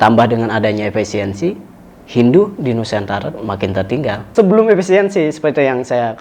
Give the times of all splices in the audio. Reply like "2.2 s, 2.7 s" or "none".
4.2 s